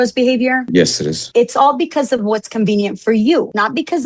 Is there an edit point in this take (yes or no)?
yes